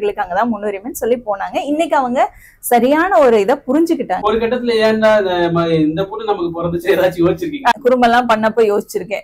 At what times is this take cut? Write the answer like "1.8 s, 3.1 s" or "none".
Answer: 4.1 s, 7.7 s